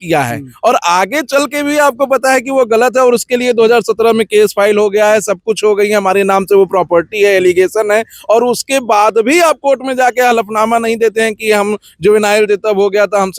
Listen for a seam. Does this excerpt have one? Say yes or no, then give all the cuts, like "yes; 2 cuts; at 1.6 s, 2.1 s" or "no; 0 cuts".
no; 0 cuts